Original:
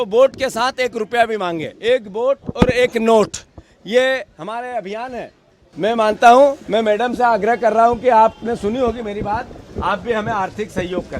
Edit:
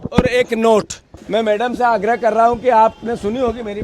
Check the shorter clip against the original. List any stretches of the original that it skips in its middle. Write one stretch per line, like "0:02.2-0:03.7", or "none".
0:03.7-0:06.6